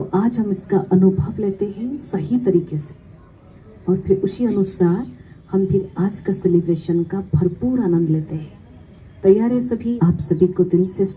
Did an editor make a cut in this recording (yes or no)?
yes